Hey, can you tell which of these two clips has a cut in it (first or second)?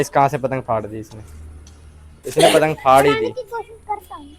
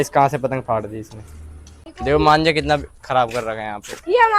second